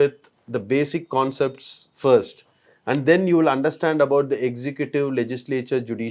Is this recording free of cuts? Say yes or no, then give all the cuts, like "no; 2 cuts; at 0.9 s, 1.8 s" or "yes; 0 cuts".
yes; 0 cuts